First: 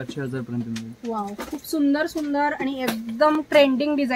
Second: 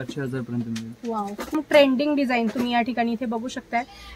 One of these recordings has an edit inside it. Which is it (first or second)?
second